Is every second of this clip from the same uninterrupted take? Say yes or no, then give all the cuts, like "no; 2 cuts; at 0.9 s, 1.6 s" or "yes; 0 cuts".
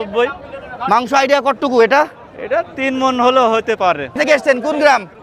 no; 1 cut; at 4.2 s